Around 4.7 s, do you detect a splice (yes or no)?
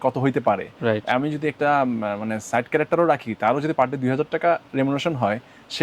no